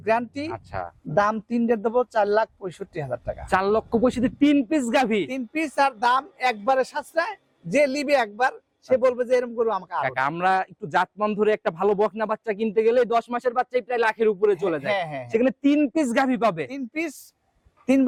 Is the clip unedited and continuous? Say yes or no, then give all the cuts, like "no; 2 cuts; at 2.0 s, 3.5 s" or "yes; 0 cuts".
yes; 0 cuts